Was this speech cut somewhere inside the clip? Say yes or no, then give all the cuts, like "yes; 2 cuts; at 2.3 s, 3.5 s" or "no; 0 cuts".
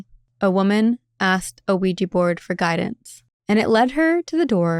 no; 0 cuts